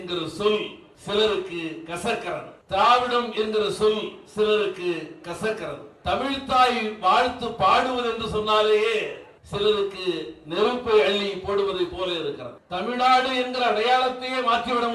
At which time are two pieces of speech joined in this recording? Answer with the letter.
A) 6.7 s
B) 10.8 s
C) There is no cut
C